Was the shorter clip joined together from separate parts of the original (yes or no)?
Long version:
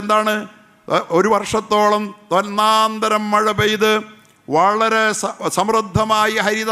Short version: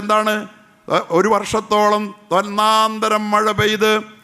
no